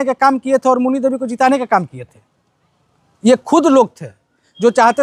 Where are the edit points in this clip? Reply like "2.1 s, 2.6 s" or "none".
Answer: none

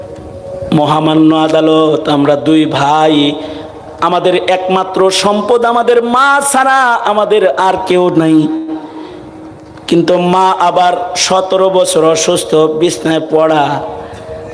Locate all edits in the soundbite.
none

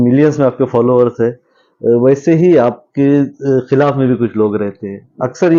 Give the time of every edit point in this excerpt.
none

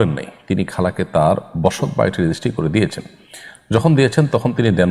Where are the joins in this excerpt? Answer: none

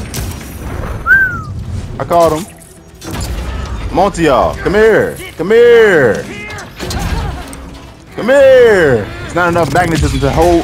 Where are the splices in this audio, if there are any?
none

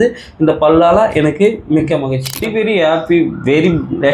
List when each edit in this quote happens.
2.5 s

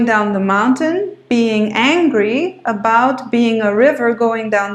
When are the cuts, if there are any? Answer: none

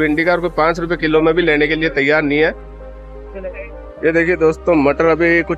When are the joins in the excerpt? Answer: 2.8 s

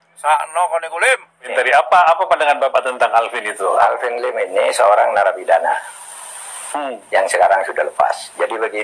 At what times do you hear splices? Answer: 1.5 s

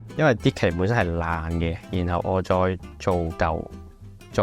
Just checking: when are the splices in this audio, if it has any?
none

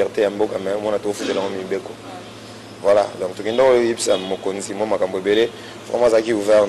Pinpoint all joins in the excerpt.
none

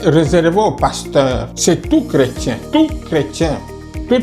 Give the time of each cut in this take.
1.5 s, 2.6 s

